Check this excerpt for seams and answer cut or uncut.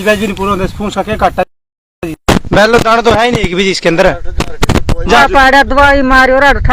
cut